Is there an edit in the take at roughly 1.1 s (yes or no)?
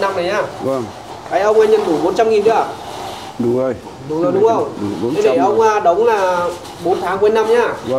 yes